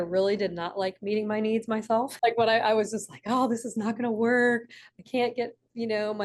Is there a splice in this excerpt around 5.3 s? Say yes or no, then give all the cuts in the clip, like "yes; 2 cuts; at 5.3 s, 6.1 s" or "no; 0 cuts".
no; 1 cut; at 2.1 s